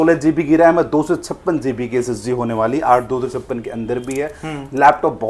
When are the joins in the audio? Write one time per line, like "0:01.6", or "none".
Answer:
none